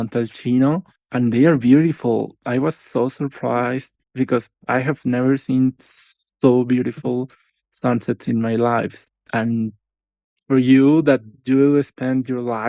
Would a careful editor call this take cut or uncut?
cut